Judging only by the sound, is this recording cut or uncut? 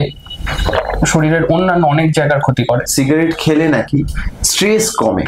cut